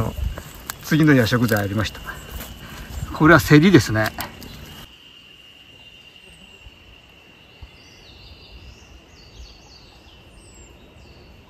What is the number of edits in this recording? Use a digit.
1